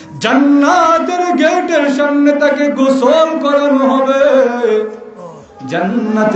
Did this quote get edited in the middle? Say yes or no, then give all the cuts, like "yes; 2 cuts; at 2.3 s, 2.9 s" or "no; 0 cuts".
no; 0 cuts